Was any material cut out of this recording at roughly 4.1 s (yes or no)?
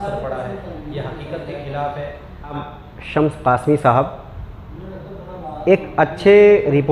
no